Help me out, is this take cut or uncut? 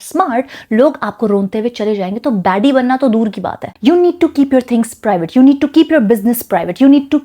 cut